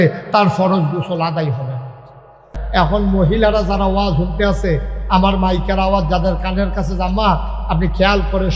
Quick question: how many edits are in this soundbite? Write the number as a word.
one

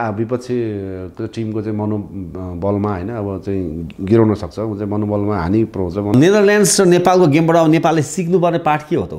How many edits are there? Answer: one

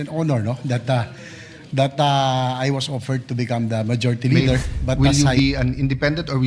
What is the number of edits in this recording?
one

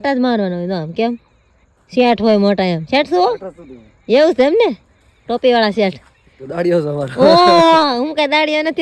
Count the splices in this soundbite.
zero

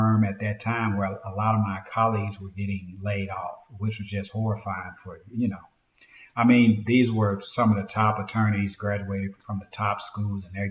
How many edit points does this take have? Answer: zero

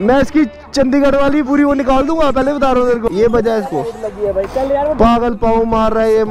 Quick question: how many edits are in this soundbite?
one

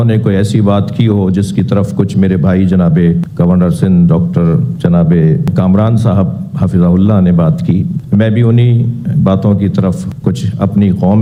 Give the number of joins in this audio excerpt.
zero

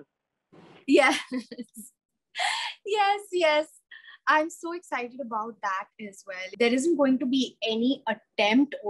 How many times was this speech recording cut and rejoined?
one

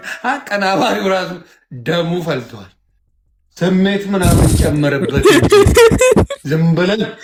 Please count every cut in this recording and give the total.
zero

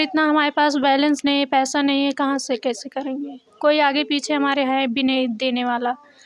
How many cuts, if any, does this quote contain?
zero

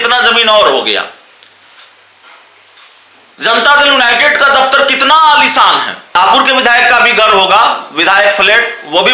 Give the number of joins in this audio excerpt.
one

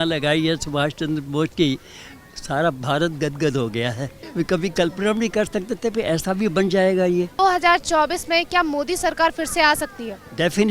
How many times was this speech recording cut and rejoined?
two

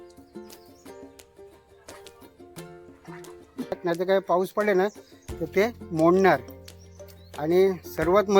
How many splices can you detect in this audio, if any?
one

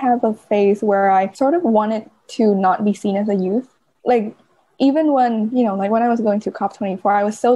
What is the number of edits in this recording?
two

